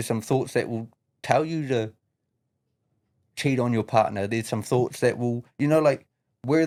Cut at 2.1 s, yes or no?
no